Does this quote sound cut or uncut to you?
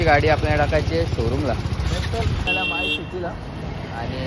cut